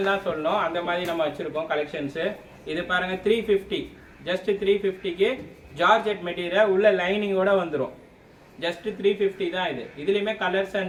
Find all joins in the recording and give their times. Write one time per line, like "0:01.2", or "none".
none